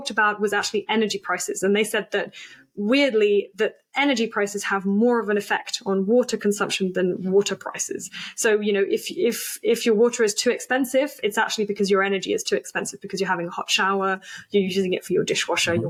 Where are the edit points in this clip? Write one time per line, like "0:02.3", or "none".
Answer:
none